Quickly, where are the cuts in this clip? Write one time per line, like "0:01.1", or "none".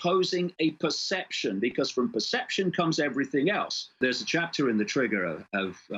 0:04.0